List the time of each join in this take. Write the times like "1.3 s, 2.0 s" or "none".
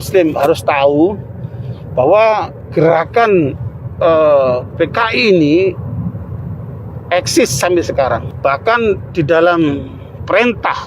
8.3 s